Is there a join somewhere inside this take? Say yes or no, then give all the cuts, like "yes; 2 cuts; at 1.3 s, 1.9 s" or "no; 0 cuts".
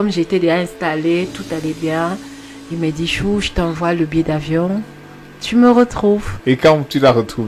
yes; 1 cut; at 6.3 s